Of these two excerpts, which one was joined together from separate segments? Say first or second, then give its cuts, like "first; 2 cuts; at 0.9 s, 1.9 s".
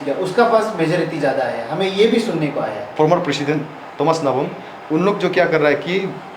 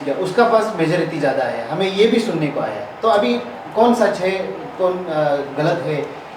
first; 1 cut; at 2.9 s